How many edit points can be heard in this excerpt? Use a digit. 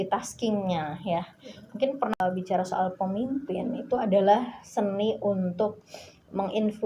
1